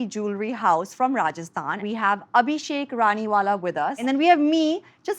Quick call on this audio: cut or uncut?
cut